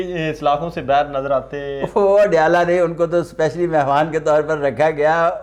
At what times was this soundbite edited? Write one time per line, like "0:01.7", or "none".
none